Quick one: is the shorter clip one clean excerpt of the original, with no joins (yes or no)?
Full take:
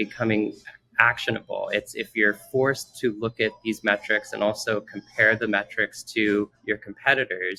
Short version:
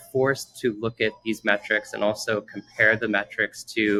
yes